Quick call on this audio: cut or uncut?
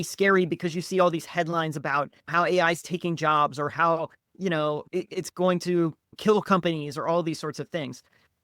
uncut